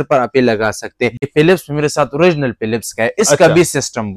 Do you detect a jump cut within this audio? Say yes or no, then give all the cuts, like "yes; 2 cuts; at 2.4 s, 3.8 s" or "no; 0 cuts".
yes; 1 cut; at 1.2 s